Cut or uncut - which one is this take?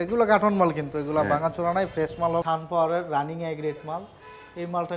cut